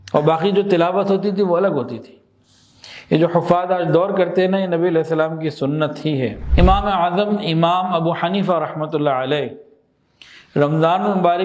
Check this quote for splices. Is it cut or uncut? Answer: cut